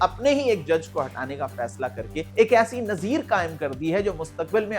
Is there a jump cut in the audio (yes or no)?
yes